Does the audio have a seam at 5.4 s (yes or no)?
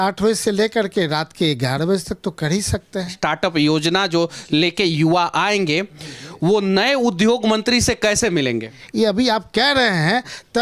no